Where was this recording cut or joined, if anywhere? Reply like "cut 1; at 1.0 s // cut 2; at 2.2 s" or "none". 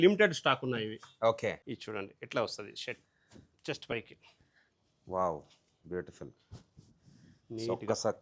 cut 1; at 1.6 s